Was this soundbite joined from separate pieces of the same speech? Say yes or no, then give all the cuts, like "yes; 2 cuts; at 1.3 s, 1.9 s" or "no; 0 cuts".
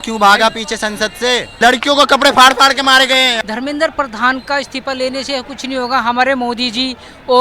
yes; 2 cuts; at 1.5 s, 3.3 s